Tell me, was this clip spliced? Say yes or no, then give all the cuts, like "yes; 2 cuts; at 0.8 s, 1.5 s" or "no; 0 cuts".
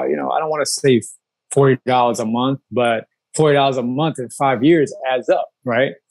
no; 0 cuts